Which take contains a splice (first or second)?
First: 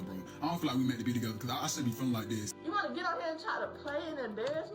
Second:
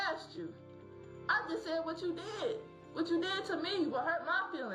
first